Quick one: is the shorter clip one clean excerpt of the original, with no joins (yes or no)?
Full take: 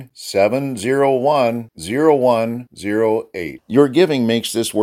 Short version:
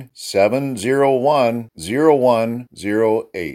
yes